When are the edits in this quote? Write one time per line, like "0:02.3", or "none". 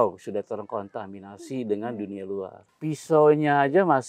0:02.6